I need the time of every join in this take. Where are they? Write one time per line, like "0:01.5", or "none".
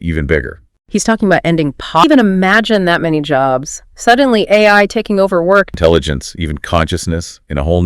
0:02.0
0:05.7